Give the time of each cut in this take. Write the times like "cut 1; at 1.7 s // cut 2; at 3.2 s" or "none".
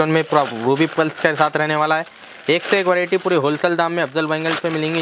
none